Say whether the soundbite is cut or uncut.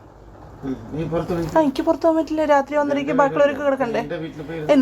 uncut